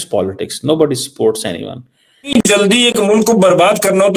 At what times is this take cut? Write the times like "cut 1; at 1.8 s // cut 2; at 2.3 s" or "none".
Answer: cut 1; at 2.3 s